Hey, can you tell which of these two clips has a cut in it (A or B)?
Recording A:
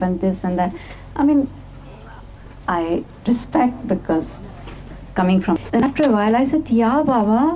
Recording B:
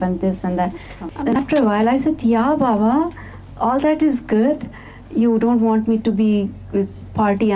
B